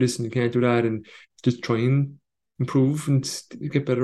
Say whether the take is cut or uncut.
cut